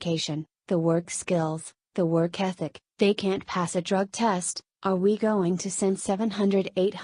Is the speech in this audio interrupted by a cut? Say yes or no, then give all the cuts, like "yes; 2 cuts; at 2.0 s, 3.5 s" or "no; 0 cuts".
yes; 1 cut; at 4.6 s